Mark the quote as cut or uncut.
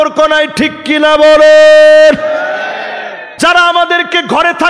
cut